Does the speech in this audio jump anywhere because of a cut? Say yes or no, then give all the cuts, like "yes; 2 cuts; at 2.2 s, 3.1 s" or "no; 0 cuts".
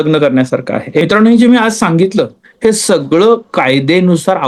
yes; 1 cut; at 1.0 s